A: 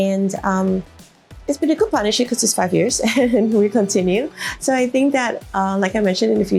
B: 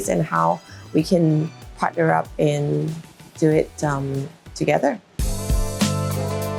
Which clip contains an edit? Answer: B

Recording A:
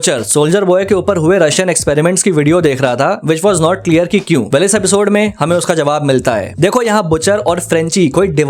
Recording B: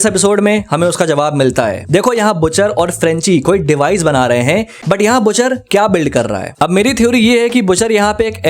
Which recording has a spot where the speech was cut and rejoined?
B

